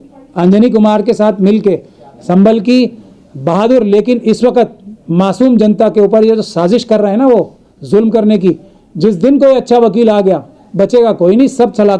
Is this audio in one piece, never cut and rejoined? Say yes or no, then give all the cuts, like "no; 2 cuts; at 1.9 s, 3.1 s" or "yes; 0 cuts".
yes; 0 cuts